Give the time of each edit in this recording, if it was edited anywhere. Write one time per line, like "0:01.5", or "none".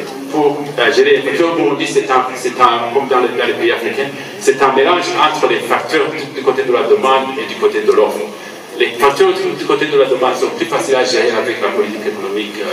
none